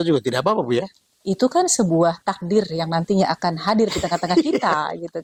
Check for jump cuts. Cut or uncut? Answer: uncut